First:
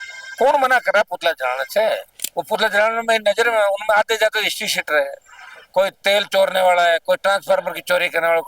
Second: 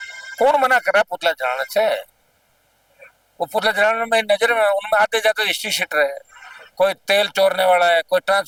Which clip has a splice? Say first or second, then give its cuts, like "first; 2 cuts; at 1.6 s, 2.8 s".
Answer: first; 1 cut; at 2.2 s